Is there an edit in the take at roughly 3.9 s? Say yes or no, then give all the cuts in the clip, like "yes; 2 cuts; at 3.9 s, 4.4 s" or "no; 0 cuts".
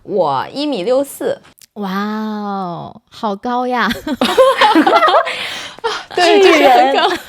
no; 0 cuts